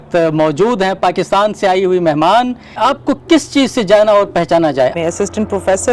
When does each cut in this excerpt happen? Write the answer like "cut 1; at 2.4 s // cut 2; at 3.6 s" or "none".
cut 1; at 2.7 s // cut 2; at 4.9 s